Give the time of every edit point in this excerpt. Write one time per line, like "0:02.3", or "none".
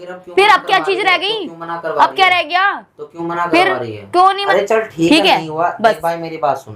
0:04.4

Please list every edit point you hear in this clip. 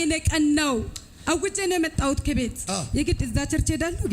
0:02.6

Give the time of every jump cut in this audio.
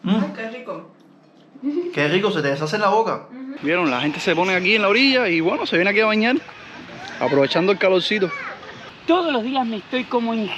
0:03.5
0:08.9

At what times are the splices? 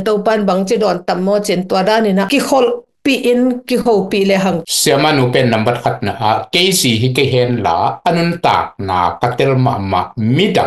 0:04.6

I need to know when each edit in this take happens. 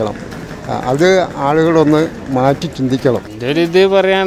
0:03.3

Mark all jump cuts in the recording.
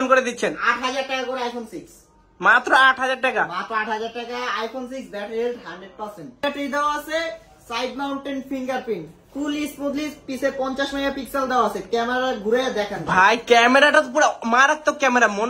0:06.4

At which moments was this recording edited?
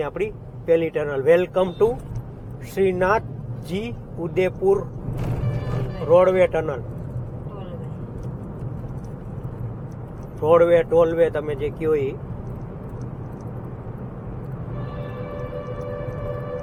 none

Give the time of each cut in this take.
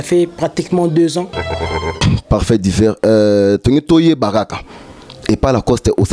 0:01.9

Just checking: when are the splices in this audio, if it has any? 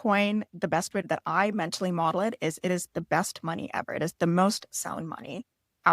0:01.0

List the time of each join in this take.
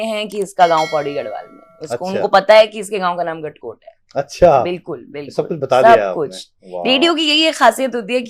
none

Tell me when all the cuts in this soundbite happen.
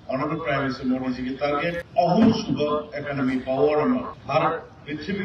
0:01.8
0:04.2

